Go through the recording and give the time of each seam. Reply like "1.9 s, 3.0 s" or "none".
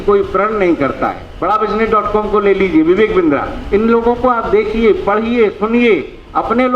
1.3 s